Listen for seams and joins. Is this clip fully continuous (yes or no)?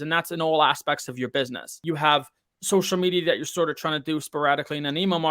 no